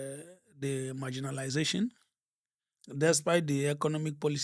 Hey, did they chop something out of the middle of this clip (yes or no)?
no